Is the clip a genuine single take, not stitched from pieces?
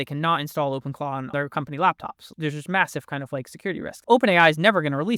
no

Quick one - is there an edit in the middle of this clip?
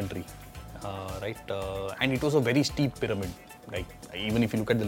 yes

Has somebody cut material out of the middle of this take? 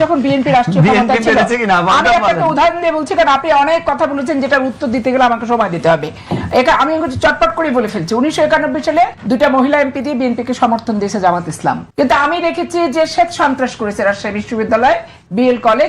yes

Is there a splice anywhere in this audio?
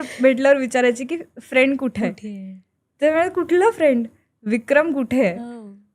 no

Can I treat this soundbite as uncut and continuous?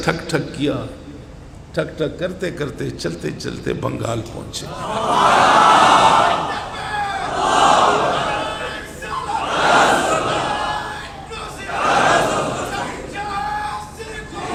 yes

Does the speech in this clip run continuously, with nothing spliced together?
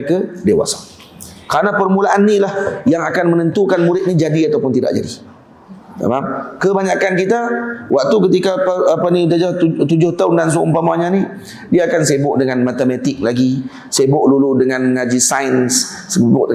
yes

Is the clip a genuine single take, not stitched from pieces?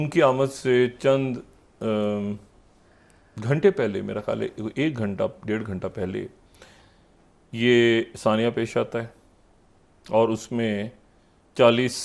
yes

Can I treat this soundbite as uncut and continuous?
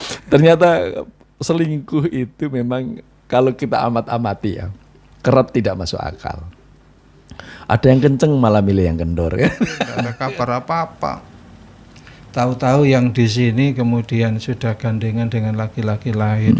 no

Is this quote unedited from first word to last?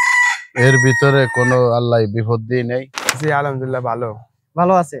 no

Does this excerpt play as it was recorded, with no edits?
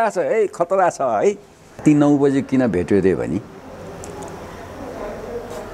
no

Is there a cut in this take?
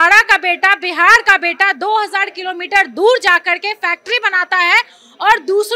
no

